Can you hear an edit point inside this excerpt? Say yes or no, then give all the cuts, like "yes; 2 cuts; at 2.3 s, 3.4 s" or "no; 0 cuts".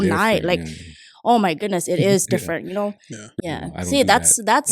yes; 1 cut; at 3.3 s